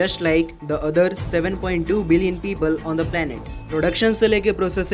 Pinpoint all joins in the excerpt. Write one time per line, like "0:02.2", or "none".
0:03.5